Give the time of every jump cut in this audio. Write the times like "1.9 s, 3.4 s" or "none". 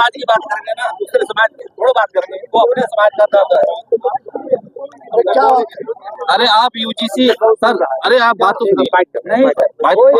none